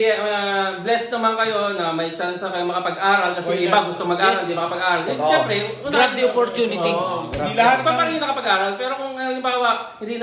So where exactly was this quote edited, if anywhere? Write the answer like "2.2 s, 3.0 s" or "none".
none